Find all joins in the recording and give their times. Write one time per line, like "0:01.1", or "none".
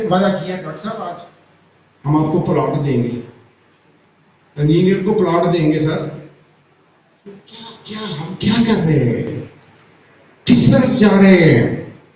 none